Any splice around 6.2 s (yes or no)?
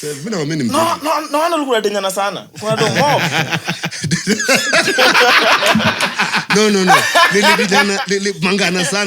no